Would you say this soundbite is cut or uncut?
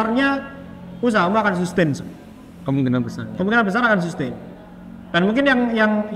uncut